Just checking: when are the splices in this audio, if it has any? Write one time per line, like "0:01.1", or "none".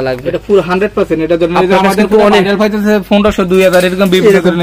none